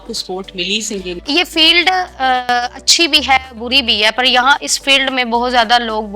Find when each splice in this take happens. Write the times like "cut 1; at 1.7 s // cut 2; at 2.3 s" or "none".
cut 1; at 1.2 s